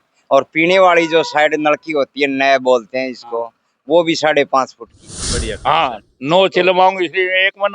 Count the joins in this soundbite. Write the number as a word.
one